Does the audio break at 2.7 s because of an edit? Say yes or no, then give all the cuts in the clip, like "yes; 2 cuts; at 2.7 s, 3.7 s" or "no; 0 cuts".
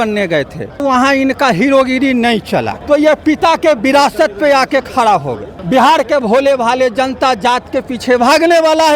yes; 3 cuts; at 0.8 s, 2.7 s, 5.5 s